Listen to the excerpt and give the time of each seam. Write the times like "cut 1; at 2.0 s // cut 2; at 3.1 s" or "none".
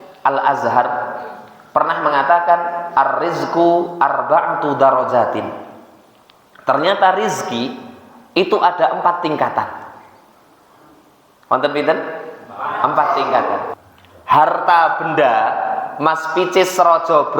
cut 1; at 13.7 s